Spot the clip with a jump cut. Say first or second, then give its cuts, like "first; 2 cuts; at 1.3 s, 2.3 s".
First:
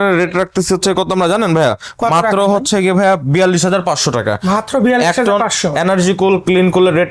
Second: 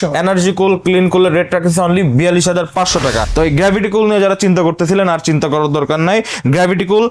second; 1 cut; at 3.3 s